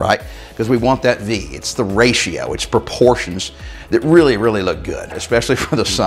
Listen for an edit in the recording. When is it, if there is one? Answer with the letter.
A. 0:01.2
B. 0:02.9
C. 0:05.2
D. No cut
C